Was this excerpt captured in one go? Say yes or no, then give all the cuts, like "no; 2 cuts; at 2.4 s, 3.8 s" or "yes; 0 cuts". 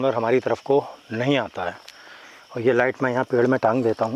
yes; 0 cuts